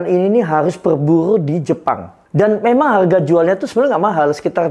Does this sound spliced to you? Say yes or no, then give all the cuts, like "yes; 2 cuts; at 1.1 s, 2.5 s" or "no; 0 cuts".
yes; 1 cut; at 2.1 s